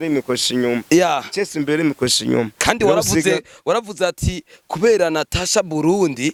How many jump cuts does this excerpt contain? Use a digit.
0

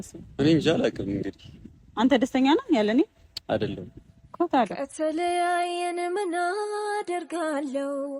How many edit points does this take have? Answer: 1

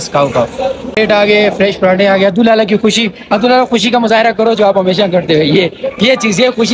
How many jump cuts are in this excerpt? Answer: 1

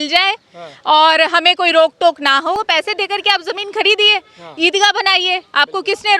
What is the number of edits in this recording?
1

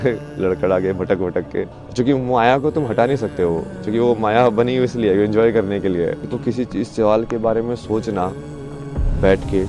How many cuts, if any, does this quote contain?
2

